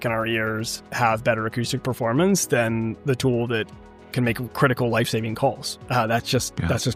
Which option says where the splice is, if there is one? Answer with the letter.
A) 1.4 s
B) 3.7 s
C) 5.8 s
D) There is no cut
D